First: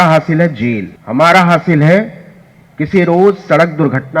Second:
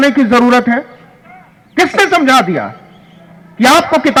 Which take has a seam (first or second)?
first